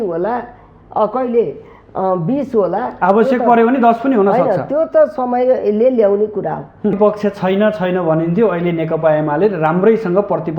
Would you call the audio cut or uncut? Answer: cut